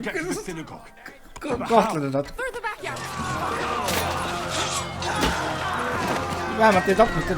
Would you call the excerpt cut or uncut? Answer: cut